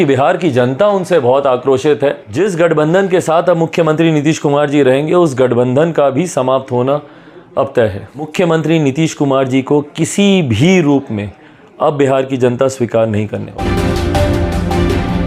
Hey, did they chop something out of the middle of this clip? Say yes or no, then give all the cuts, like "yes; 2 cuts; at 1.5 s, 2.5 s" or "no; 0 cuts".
yes; 3 cuts; at 2.3 s, 8.3 s, 13.6 s